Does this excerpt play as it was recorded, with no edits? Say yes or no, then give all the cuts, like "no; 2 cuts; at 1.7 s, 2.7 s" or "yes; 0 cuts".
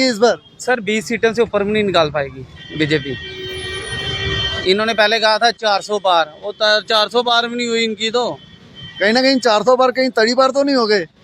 yes; 0 cuts